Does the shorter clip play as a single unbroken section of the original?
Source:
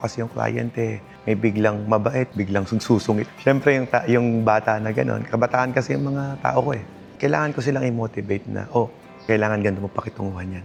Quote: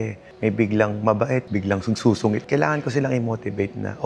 no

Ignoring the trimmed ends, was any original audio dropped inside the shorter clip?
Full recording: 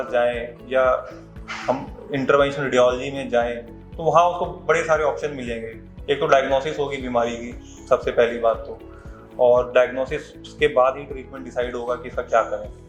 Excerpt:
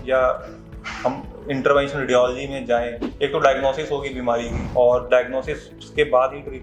yes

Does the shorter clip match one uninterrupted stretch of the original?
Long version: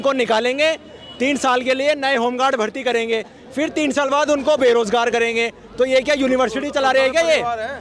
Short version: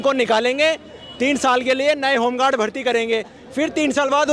yes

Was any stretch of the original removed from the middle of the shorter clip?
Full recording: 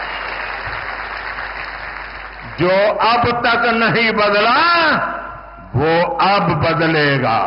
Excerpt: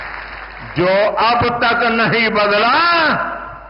no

